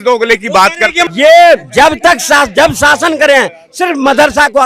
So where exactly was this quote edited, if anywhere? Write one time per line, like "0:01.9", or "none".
0:01.0

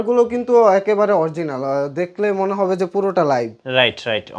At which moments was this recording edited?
none

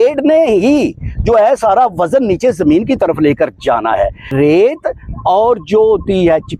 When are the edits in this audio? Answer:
0:04.3

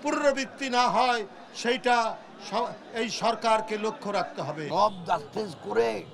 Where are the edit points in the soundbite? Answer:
0:04.6

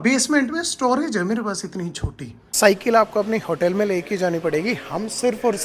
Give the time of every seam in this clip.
0:02.5

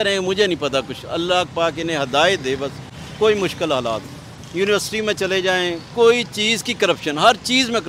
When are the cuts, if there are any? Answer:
none

